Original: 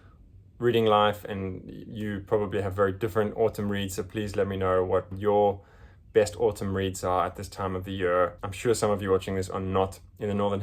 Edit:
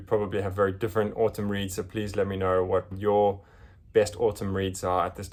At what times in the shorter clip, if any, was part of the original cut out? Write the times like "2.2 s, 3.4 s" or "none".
none